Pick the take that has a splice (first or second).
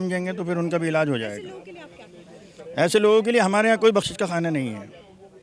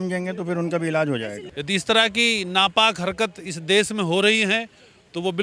second